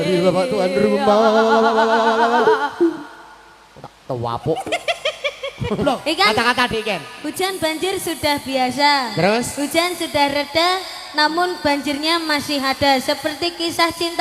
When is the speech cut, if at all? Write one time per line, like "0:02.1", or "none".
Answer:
0:05.8